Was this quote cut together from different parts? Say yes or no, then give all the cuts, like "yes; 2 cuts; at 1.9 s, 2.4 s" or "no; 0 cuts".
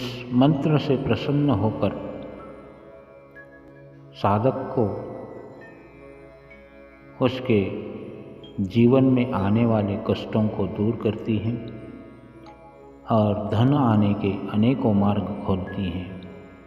yes; 2 cuts; at 2.8 s, 4.2 s